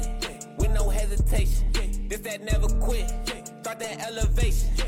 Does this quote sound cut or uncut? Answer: uncut